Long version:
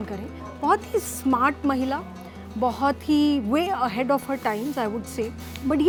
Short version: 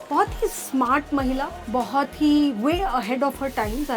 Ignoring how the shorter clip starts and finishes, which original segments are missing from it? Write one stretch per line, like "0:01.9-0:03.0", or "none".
0:02.1-0:02.4